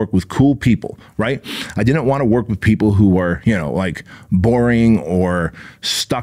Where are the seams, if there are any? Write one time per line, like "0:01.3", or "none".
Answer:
none

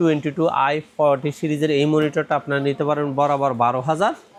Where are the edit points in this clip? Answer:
none

